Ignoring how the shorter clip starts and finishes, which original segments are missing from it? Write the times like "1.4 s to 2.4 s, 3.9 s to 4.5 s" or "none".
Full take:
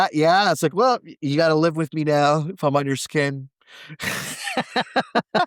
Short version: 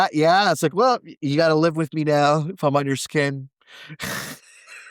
none

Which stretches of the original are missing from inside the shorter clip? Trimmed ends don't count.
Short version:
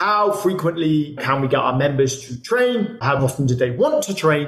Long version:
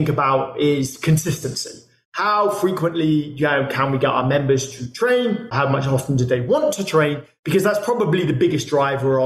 3.3 s to 3.7 s, 5.7 s to 5.9 s

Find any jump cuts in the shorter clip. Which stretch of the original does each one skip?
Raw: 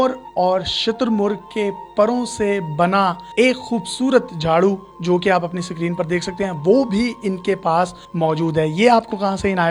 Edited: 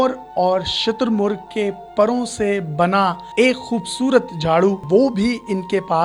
4.8 s to 6.6 s

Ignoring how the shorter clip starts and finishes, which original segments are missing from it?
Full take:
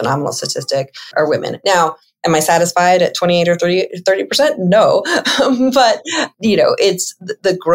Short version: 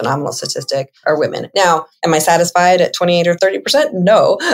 0.9 s to 1.0 s, 2.0 s to 2.1 s, 3.6 s to 4.0 s

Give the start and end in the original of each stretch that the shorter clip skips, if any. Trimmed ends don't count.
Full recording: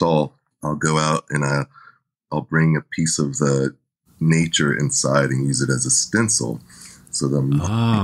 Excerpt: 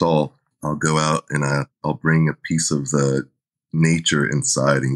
1.7 s to 2.2 s

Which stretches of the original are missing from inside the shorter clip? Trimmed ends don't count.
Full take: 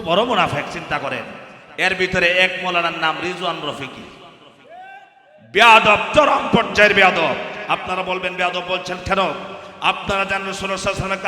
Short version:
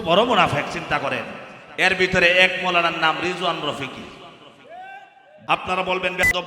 5.3 s to 7.5 s

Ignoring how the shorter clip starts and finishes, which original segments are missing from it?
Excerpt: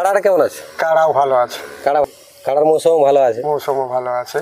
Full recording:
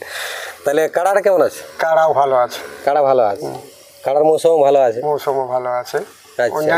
3.1 s to 3.6 s

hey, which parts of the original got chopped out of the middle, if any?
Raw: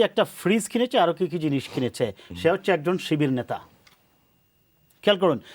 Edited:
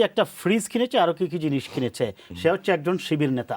none

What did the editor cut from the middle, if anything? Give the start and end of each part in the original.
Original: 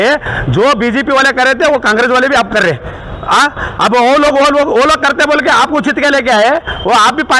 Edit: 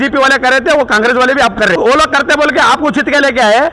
2.7 s to 4.7 s

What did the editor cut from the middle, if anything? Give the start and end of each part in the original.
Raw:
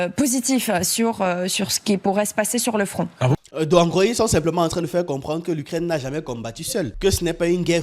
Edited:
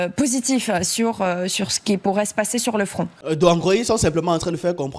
3.1 s to 3.4 s

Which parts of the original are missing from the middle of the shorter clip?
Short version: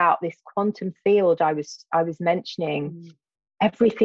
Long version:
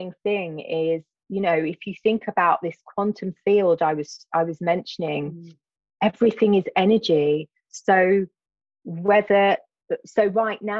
none

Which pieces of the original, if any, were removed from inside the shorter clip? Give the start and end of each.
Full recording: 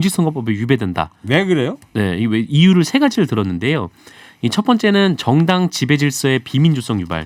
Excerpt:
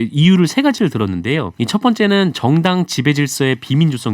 3.9 s to 4.4 s

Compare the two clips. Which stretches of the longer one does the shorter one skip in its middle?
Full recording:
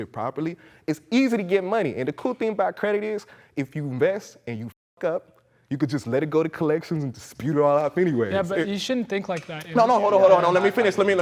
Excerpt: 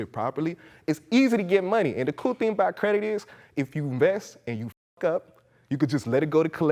none

